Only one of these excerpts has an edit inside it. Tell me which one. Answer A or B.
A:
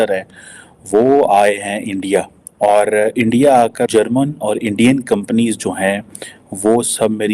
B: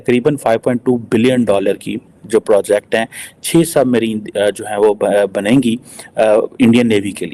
A